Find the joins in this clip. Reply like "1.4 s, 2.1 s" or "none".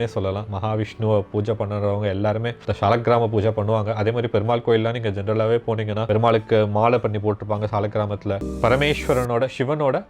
2.6 s, 6.0 s, 8.5 s